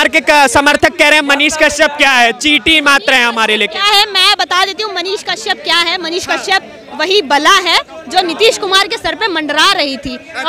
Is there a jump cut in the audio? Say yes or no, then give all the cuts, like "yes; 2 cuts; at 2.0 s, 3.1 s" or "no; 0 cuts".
no; 0 cuts